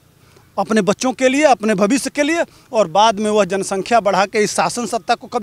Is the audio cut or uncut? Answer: uncut